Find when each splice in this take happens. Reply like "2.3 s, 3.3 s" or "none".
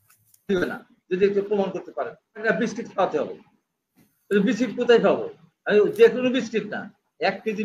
2.5 s

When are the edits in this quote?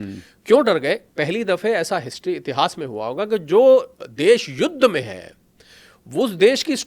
1.1 s

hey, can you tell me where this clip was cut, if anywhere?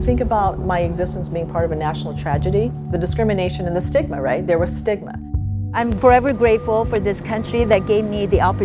none

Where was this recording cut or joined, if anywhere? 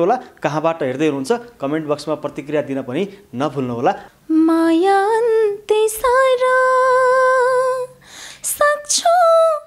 4.0 s

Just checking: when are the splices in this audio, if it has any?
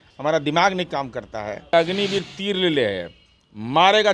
1.7 s

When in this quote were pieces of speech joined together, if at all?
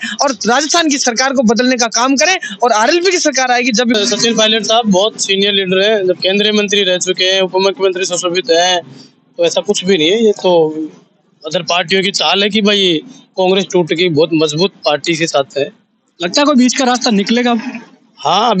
4.0 s

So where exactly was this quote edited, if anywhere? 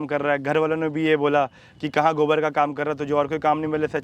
none

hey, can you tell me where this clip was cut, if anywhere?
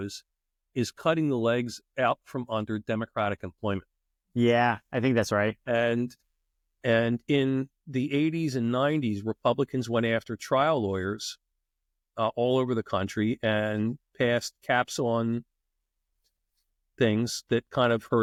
none

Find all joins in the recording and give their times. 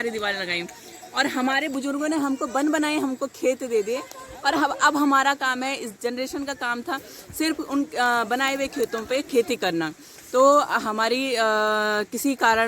none

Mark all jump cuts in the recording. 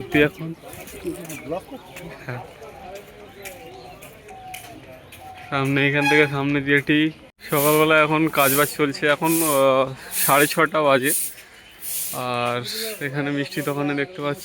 7.3 s

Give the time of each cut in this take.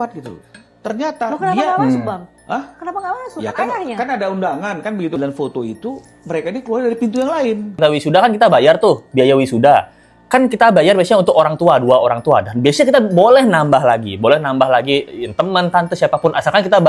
5.2 s, 7.8 s

